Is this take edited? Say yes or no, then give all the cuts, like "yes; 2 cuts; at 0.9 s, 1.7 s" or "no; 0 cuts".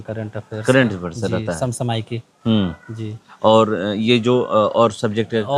no; 0 cuts